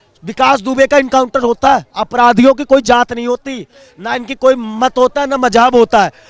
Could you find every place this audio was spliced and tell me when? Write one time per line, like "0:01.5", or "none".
0:02.0

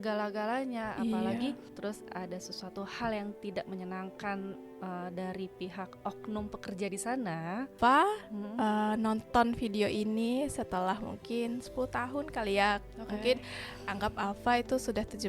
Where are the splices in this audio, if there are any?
0:01.7
0:07.7

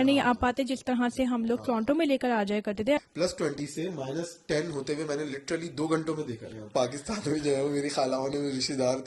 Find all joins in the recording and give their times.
0:03.0
0:06.7

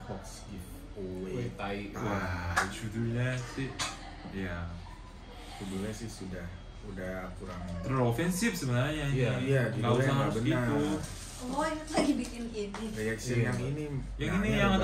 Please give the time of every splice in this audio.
none

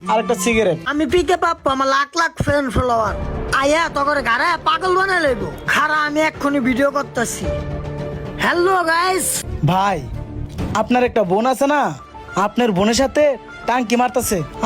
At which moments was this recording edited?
0:00.8
0:09.4

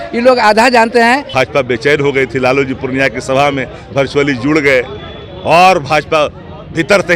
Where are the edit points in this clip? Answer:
0:01.3

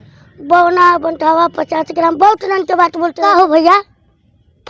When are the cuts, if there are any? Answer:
0:03.2

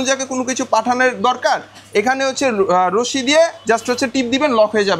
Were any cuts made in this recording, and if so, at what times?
none

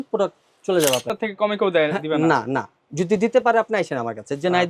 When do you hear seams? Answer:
0:01.1

